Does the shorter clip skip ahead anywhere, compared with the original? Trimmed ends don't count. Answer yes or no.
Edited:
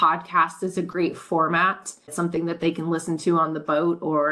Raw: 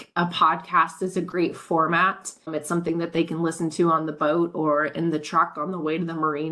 yes